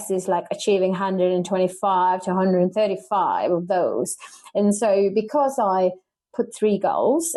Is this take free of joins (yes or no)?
yes